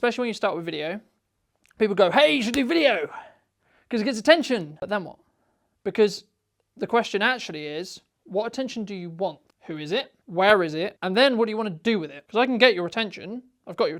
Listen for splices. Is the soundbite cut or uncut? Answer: cut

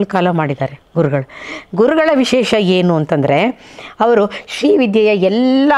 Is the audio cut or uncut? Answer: uncut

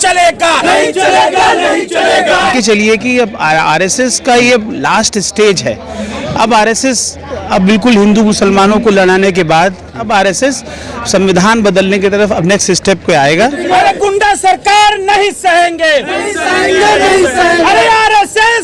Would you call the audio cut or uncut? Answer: cut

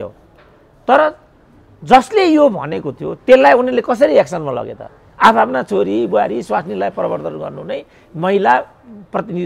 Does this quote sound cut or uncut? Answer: uncut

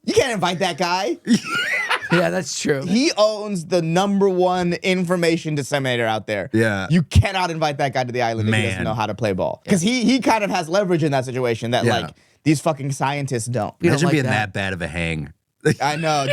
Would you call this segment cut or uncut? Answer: cut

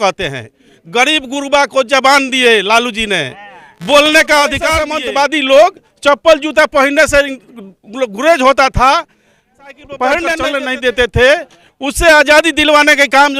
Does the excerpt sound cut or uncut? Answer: cut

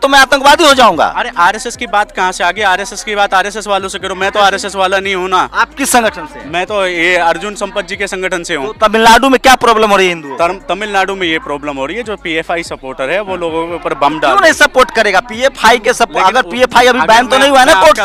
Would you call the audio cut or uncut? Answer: uncut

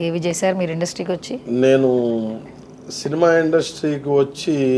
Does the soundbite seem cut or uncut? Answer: uncut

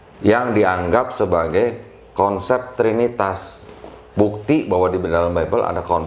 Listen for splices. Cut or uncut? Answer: uncut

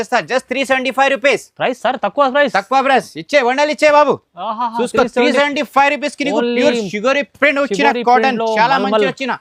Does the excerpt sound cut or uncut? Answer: uncut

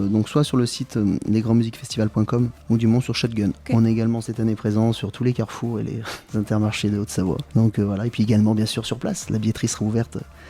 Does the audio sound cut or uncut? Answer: cut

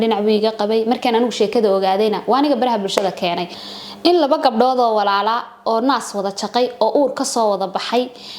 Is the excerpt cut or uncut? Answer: cut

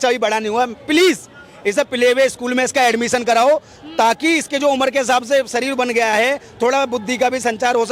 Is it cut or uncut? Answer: uncut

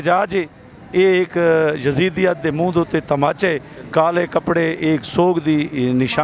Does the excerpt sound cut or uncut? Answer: uncut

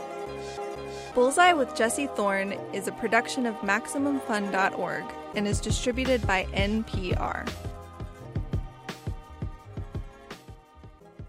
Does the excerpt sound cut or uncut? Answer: uncut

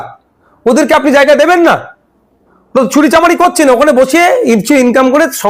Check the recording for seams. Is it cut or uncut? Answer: uncut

